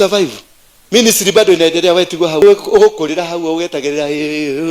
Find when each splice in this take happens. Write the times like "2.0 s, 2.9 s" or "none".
2.4 s